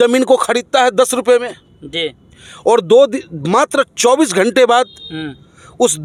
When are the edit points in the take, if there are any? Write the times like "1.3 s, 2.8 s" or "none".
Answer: none